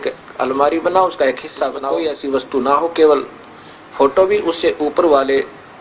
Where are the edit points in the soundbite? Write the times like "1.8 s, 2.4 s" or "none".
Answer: 1.8 s